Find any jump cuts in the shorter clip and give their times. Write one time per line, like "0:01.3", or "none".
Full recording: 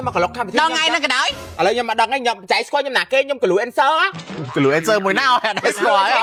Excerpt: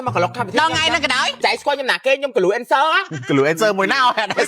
0:01.3
0:03.1